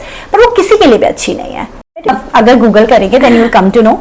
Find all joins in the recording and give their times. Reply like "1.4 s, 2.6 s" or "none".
2.1 s